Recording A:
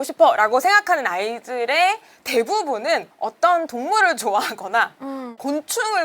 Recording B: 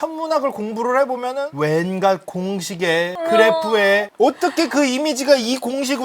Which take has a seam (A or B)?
B